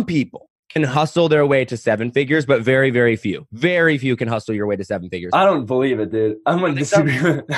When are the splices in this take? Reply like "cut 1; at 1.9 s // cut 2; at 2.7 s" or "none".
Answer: none